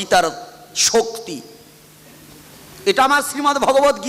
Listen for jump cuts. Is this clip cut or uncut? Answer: uncut